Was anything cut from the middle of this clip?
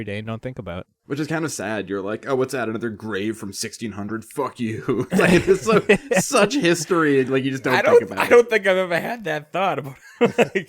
yes; 1 cut; at 0.9 s

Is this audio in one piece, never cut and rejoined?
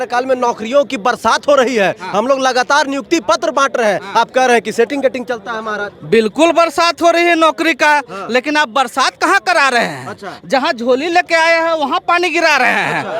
yes; 0 cuts

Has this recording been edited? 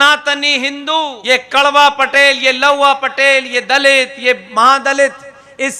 yes; 1 cut; at 1.2 s

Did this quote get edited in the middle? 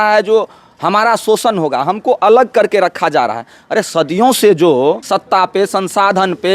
yes; 1 cut; at 5.0 s

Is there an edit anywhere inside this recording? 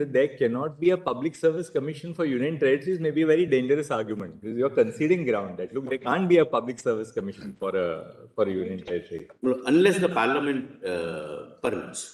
no; 0 cuts

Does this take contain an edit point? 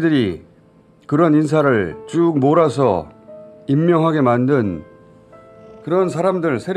no; 0 cuts

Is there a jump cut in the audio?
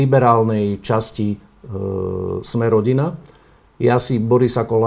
no; 0 cuts

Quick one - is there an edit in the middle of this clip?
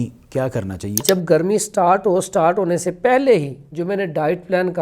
yes; 1 cut; at 1.0 s

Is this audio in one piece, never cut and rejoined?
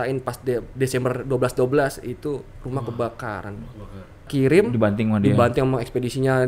no; 1 cut; at 4.3 s

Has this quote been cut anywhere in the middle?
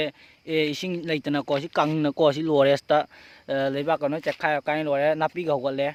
no; 0 cuts

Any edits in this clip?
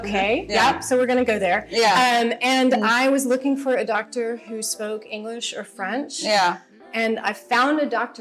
no; 0 cuts

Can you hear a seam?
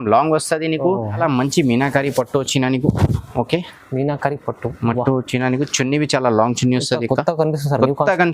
yes; 1 cut; at 1.2 s

